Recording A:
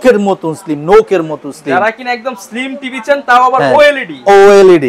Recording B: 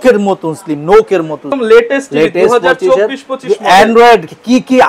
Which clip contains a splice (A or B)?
B